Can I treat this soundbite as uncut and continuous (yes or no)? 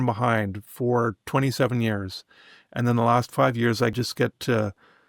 no